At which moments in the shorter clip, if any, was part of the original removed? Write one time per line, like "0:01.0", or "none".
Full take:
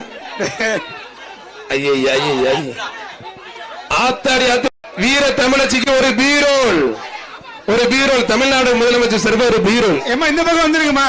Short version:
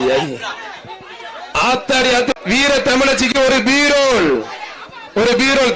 0:02.4